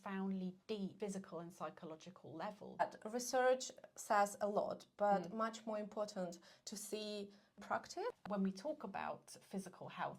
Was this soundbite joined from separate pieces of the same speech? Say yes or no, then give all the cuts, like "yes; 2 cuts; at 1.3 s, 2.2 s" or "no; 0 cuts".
yes; 3 cuts; at 0.9 s, 2.8 s, 7.6 s